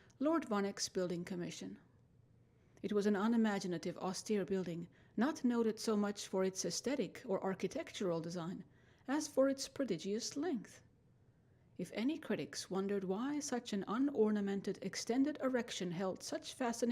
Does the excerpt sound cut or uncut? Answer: cut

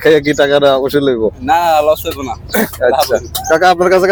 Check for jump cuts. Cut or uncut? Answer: uncut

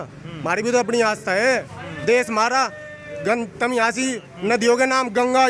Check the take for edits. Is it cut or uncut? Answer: uncut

